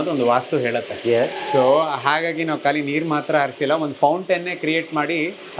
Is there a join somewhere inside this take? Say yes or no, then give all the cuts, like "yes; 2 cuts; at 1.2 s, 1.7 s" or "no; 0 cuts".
no; 0 cuts